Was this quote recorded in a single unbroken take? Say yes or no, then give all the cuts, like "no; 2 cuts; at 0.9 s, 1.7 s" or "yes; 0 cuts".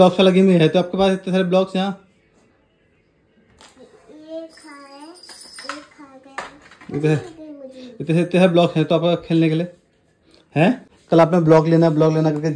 yes; 0 cuts